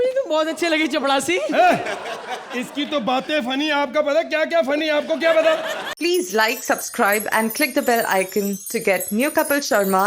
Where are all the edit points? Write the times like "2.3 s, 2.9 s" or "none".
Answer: 5.8 s